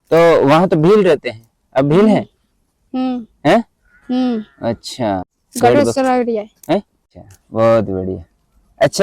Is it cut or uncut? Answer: cut